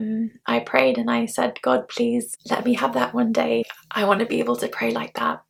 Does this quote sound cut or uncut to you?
uncut